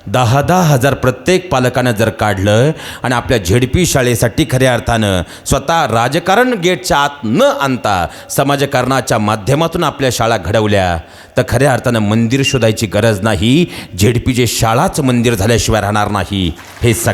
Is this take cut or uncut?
uncut